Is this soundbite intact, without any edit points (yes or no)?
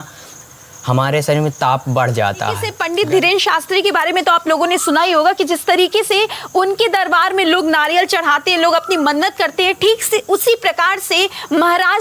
no